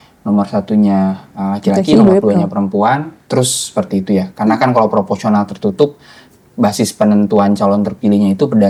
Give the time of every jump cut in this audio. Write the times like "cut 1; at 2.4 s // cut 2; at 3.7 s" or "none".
none

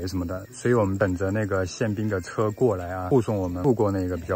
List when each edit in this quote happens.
cut 1; at 0.9 s // cut 2; at 3.4 s

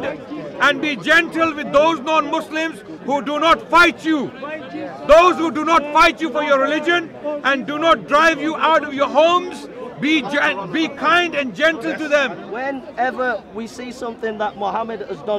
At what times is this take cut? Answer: cut 1; at 12.4 s

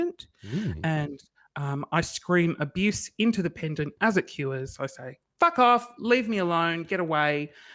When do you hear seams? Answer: none

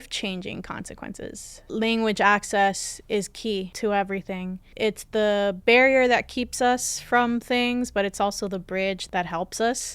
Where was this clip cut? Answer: cut 1; at 1.6 s // cut 2; at 3.7 s // cut 3; at 4.6 s // cut 4; at 9.0 s

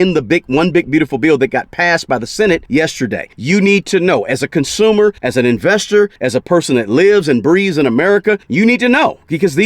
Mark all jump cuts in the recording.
cut 1; at 2.9 s // cut 2; at 5.2 s // cut 3; at 6.2 s // cut 4; at 8.5 s

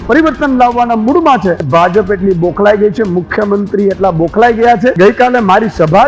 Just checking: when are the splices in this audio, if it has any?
cut 1; at 1.7 s // cut 2; at 5.0 s

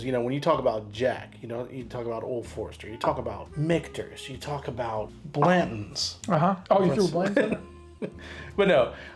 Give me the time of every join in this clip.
cut 1; at 3.5 s // cut 2; at 5.2 s // cut 3; at 6.6 s

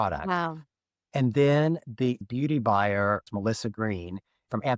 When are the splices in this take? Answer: cut 1; at 2.2 s // cut 2; at 3.3 s

